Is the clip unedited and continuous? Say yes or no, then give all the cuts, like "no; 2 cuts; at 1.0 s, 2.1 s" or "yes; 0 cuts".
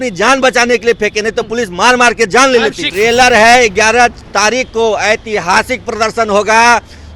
no; 1 cut; at 2.8 s